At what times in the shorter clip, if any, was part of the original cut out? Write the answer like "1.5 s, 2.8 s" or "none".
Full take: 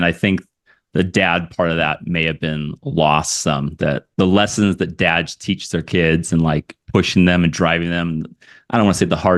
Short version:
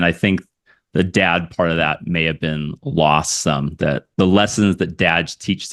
none